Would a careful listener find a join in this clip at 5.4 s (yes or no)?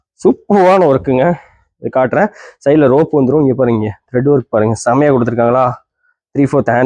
no